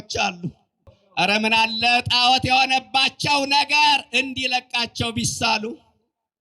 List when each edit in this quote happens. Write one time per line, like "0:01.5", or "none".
0:01.0